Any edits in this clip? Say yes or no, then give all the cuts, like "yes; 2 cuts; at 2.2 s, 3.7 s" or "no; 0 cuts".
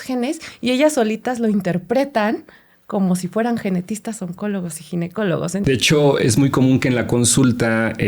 yes; 1 cut; at 5.6 s